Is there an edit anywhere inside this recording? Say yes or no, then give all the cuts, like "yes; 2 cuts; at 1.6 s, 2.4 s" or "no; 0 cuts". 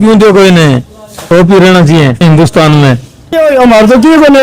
yes; 2 cuts; at 2.2 s, 3.4 s